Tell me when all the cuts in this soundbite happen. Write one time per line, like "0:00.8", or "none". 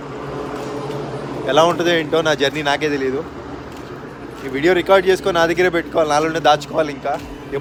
none

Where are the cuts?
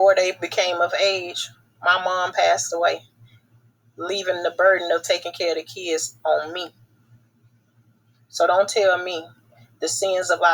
none

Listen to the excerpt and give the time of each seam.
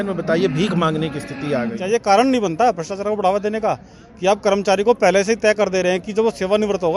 0:01.8

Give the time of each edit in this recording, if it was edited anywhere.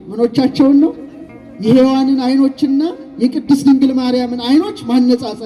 none

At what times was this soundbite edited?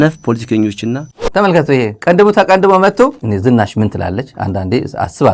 0:01.3
0:03.2

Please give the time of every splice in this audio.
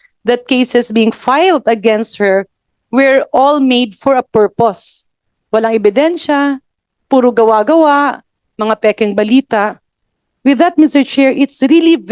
none

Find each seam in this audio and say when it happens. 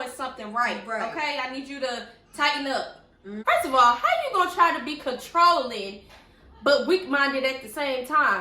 0:03.4

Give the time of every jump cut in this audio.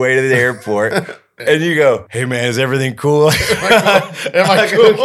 0:01.3
0:02.1

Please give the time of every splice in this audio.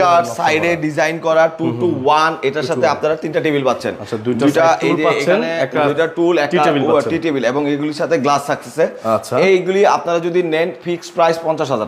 none

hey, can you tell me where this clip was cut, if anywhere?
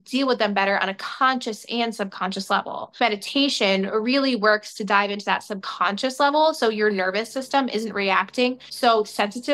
0:03.0

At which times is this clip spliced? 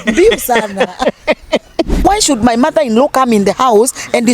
0:02.0

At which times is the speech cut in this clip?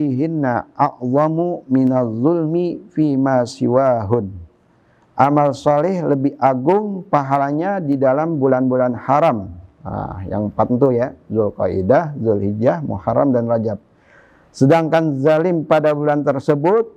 none

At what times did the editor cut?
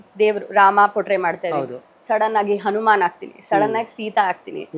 none

